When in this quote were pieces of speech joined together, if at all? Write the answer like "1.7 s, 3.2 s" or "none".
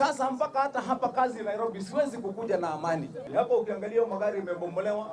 3.3 s